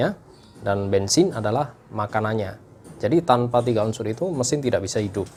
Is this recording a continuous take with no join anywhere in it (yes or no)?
yes